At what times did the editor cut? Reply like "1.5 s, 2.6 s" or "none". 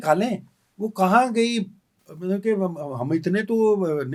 none